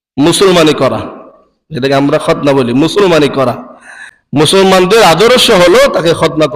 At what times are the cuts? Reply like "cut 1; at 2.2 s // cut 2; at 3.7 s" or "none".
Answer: cut 1; at 4.5 s